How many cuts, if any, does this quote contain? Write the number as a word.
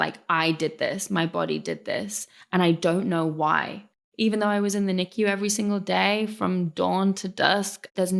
one